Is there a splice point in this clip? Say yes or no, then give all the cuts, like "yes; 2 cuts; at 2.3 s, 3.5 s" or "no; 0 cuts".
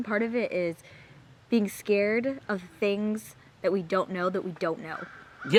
no; 0 cuts